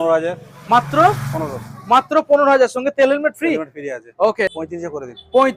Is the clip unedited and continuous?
no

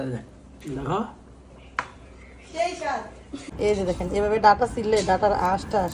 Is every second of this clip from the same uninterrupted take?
no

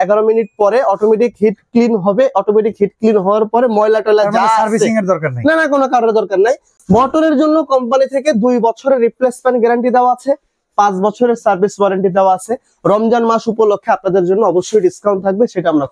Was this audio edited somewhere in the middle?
yes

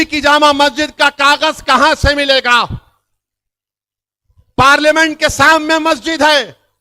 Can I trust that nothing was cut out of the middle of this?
yes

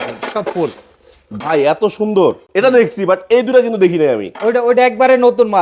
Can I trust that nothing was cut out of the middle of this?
yes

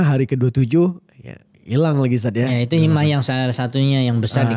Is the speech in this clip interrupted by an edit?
no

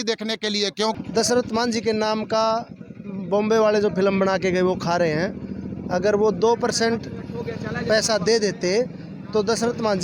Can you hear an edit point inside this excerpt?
yes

